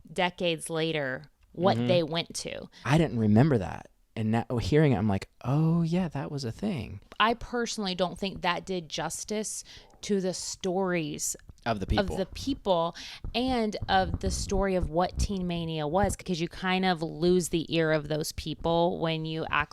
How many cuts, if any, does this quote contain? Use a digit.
3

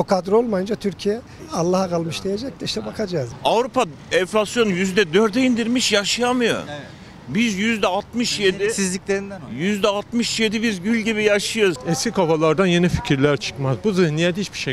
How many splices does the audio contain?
4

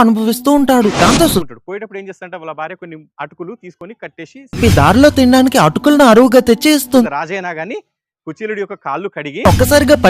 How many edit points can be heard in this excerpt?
2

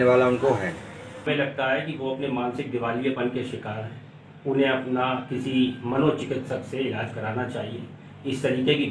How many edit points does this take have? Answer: 1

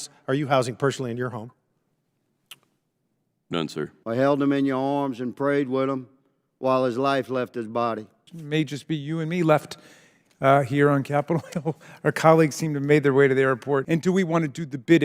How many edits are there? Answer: 3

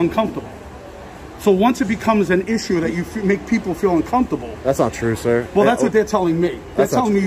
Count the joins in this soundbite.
0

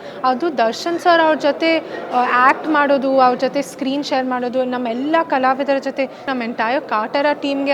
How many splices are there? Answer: 1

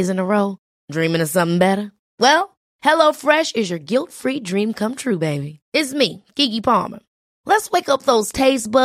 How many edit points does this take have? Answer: 0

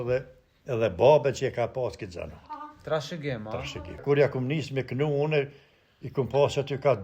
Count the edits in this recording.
1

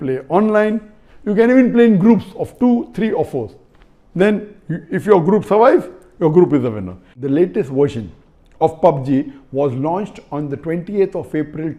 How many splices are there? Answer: 1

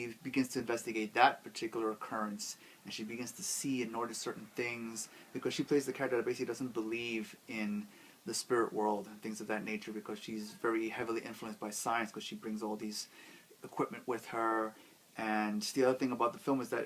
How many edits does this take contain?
1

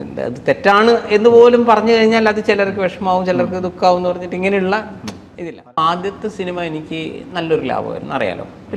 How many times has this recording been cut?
1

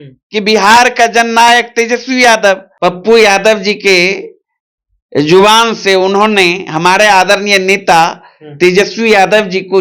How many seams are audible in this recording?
1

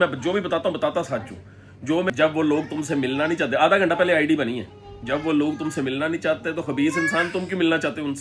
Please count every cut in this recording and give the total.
1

